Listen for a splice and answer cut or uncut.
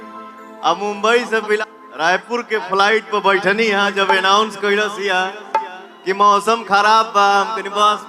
cut